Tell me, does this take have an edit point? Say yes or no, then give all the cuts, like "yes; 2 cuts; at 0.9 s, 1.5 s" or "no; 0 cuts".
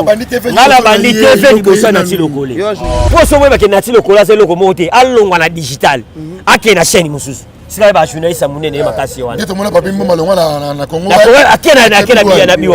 yes; 1 cut; at 3.0 s